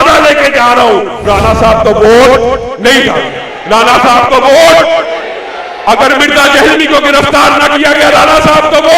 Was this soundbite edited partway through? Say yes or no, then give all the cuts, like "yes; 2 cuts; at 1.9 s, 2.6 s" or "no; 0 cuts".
yes; 1 cut; at 1.2 s